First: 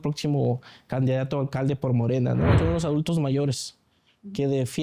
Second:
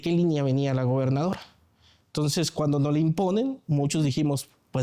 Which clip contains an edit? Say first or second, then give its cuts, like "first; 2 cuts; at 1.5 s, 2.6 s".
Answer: first; 1 cut; at 2.6 s